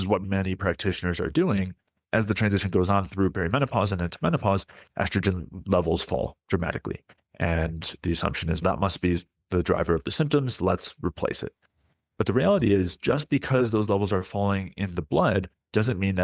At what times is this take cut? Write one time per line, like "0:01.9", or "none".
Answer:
0:02.0